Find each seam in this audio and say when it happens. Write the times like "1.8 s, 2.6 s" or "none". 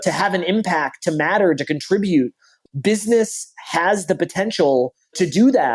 2.5 s